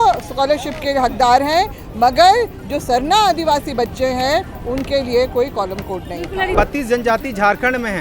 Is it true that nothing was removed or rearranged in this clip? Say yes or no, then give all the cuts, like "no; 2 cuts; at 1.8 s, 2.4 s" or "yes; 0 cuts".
no; 1 cut; at 6.5 s